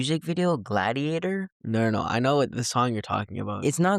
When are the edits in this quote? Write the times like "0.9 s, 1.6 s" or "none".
none